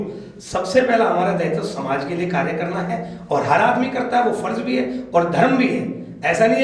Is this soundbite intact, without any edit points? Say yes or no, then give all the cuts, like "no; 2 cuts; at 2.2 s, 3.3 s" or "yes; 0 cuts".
yes; 0 cuts